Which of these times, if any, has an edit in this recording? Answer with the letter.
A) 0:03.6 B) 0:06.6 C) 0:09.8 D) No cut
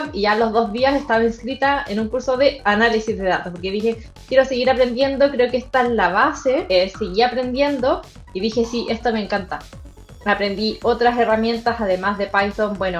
B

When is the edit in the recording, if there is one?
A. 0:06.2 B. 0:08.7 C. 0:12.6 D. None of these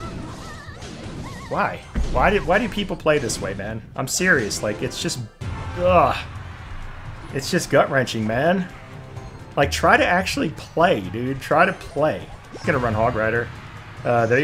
C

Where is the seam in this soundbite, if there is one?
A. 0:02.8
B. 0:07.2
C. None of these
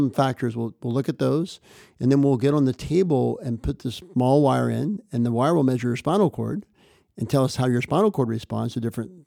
C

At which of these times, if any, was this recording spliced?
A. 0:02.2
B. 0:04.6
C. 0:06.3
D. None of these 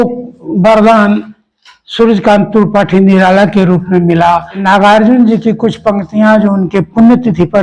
B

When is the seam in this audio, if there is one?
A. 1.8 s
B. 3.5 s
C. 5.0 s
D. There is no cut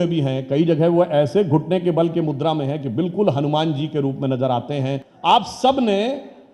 C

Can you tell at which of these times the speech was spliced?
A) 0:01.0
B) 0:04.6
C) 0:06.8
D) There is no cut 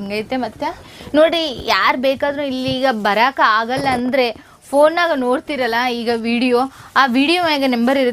A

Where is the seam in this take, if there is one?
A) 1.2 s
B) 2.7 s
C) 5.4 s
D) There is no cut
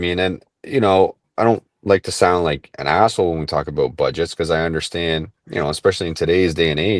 A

